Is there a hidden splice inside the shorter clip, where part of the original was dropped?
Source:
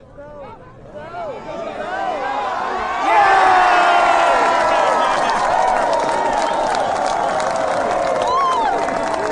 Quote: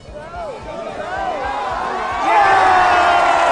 no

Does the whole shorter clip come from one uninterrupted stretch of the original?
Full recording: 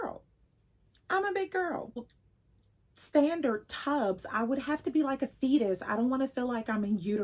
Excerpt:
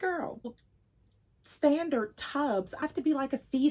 no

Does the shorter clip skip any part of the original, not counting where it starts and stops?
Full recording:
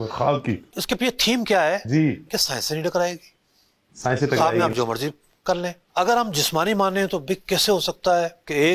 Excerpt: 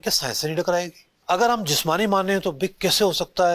yes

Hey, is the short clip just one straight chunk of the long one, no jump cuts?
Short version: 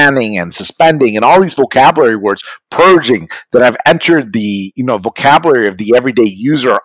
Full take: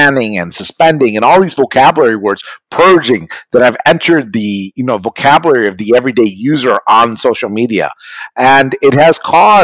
yes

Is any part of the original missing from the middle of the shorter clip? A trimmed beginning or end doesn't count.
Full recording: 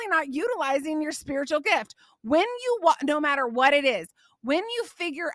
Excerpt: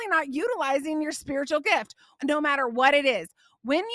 yes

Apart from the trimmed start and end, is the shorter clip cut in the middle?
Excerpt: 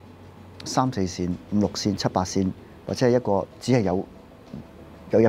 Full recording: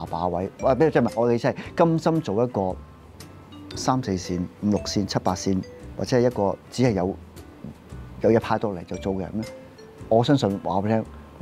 no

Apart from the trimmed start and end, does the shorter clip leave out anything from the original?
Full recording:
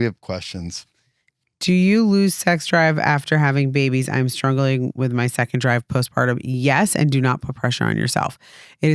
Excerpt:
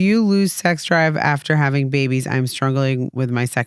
no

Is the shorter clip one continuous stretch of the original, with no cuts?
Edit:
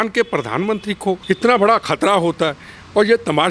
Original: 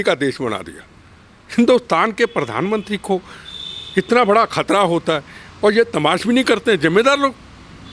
no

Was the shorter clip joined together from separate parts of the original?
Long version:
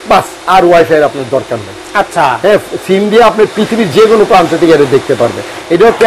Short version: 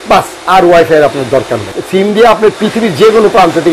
yes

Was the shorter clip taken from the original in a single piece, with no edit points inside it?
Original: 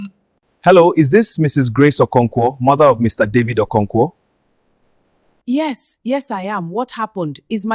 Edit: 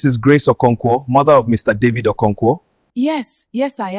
no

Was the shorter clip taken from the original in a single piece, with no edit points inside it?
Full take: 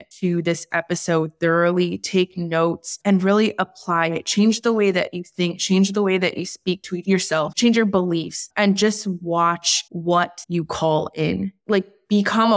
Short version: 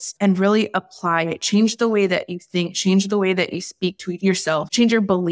yes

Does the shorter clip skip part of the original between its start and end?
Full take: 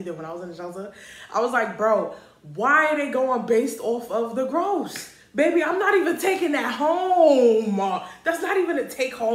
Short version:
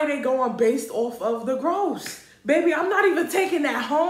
no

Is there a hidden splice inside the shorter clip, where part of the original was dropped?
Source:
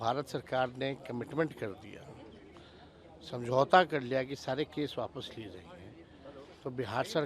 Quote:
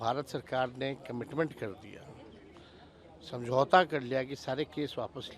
no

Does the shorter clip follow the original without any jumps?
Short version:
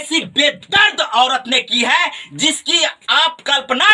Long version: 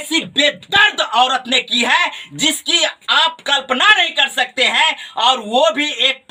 yes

